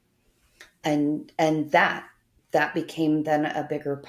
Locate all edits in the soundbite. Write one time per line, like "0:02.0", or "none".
none